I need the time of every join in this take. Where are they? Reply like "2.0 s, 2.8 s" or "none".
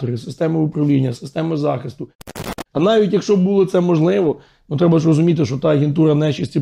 2.4 s